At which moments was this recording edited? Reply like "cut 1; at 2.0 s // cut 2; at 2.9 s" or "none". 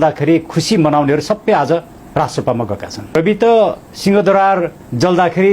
cut 1; at 3.2 s